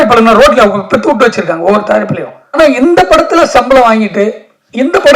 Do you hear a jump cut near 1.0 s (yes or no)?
no